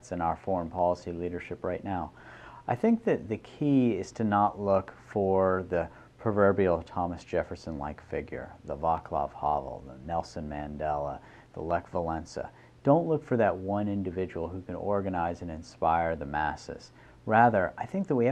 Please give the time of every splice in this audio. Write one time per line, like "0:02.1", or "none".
0:06.2